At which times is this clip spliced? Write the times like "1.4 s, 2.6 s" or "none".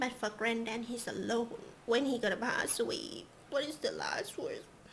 1.7 s